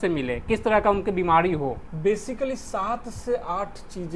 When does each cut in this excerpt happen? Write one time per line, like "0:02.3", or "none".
0:01.9